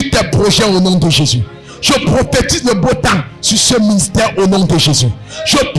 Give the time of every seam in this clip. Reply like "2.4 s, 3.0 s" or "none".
none